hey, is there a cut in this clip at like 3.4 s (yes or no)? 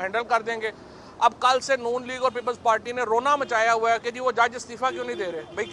no